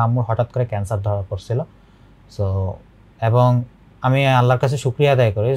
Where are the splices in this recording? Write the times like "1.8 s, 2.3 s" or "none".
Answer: none